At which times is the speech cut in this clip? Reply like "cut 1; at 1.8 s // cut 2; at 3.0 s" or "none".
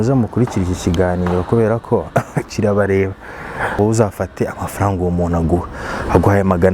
cut 1; at 3.7 s

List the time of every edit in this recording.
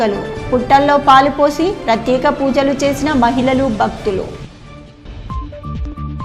none

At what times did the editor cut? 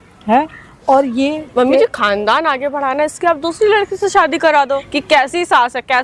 cut 1; at 4.9 s

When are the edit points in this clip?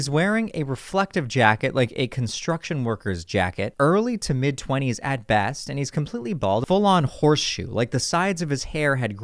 cut 1; at 3.7 s // cut 2; at 6.6 s

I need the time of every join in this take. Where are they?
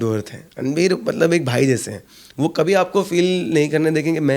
none

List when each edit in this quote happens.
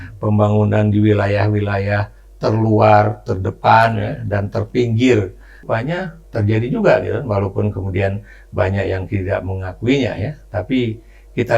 cut 1; at 5.6 s

